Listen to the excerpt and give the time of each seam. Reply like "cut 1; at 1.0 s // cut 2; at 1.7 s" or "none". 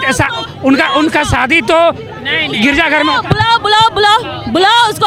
none